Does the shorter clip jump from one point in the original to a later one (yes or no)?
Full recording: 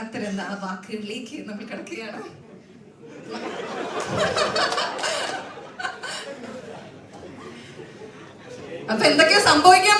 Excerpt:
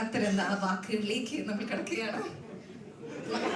no